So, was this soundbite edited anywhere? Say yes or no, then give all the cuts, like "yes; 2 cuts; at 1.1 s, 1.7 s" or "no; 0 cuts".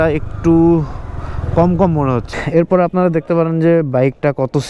yes; 1 cut; at 2.3 s